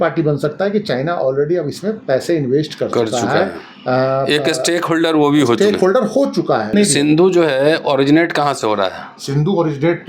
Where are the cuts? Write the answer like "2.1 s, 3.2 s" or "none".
6.7 s